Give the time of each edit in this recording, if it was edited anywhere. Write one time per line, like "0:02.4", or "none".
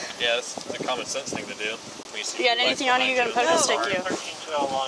none